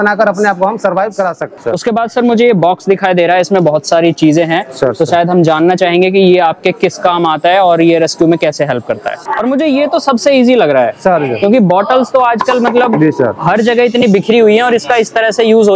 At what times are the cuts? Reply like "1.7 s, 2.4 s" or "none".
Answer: 1.5 s, 9.2 s